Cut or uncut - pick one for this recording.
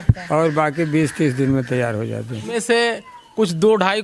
cut